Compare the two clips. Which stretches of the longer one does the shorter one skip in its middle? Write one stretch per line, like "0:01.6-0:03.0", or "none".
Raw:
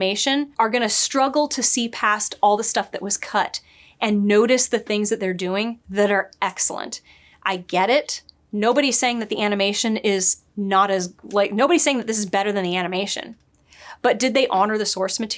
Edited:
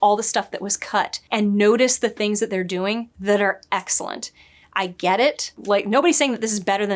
0:03.6-0:03.9
0:08.2-0:11.2